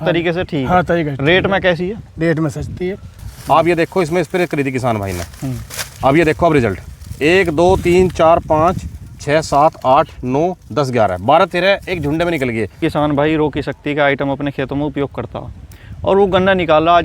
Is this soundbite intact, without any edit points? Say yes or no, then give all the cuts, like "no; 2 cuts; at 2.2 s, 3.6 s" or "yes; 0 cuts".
no; 2 cuts; at 3.1 s, 12.8 s